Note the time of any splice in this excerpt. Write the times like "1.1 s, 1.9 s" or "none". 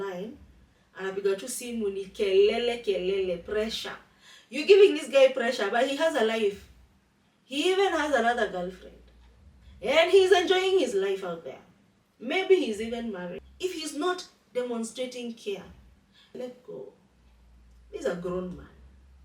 13.5 s, 16.4 s

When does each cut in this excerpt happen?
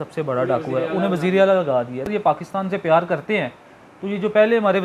2.3 s

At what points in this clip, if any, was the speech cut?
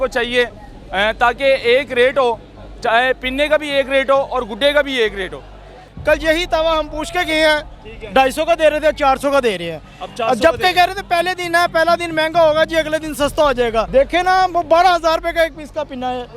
5.9 s, 13.9 s

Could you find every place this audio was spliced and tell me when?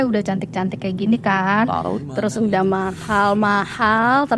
none

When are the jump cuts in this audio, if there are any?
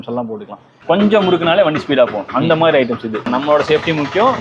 1.0 s, 3.3 s

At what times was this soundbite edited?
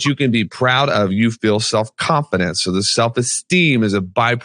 none

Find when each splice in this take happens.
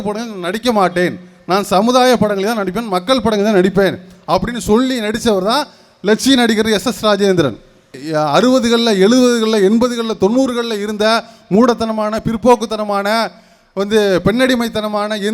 8.0 s

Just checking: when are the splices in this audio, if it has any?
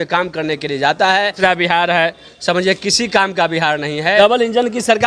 1.3 s, 4.2 s

